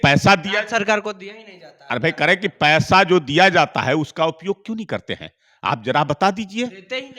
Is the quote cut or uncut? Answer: uncut